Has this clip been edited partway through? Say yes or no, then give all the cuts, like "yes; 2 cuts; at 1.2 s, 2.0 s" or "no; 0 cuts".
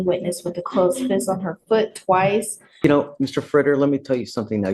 yes; 1 cut; at 2.8 s